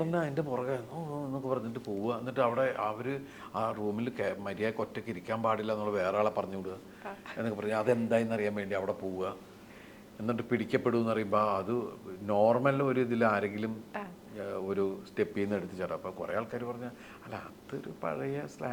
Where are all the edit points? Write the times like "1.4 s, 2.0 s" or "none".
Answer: none